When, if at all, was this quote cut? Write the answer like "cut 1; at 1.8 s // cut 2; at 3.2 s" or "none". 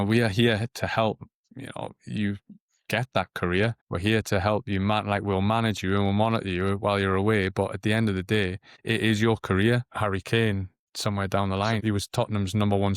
cut 1; at 9.9 s // cut 2; at 10.8 s // cut 3; at 11.8 s